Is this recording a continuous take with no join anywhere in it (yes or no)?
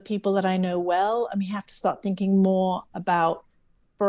yes